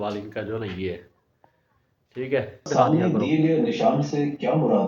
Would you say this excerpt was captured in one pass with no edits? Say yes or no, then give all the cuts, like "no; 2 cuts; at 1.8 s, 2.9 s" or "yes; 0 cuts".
no; 1 cut; at 2.7 s